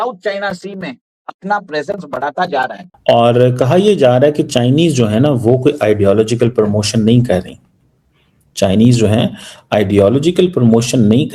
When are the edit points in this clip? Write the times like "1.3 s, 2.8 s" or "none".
2.9 s